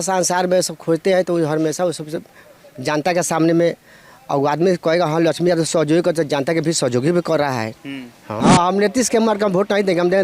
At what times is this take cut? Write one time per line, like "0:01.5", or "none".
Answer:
0:08.4